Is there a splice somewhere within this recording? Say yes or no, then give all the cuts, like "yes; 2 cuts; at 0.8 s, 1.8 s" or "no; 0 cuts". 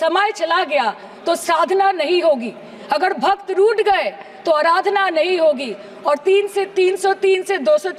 no; 0 cuts